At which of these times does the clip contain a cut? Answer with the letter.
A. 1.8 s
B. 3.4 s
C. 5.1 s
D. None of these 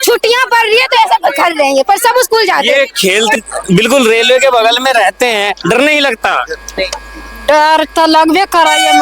B